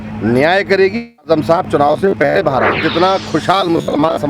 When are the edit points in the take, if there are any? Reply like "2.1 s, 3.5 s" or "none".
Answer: 2.8 s